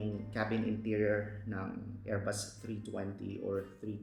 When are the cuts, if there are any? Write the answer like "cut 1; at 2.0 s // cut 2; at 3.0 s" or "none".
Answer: none